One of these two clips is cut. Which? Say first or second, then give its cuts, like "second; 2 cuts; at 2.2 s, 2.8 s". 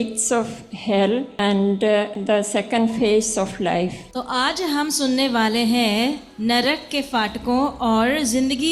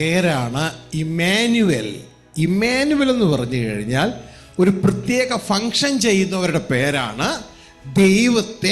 first; 3 cuts; at 1.3 s, 2.2 s, 4.1 s